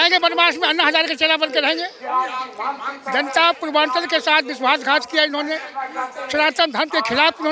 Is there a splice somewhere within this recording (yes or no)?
no